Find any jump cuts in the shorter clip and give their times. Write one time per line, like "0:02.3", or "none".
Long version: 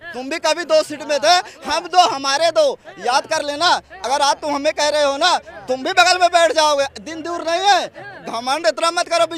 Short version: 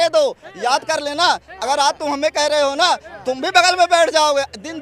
none

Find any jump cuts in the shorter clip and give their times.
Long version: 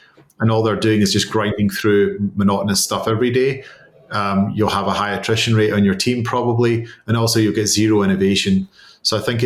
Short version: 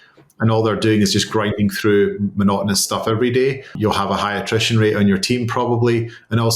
0:03.8

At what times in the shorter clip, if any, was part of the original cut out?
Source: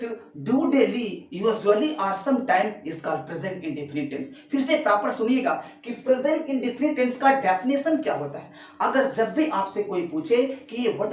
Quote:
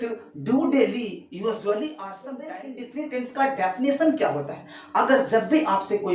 0:02.5

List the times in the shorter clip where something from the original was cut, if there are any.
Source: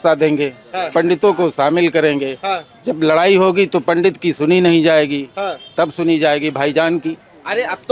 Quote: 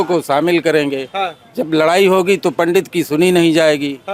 none

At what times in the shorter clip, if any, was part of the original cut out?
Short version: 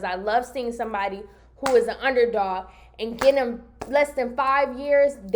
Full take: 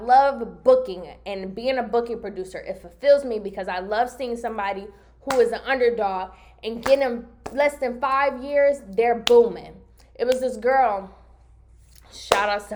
none

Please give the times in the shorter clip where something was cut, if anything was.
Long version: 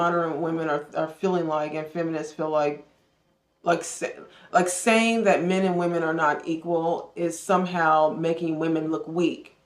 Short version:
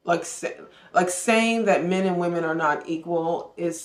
none

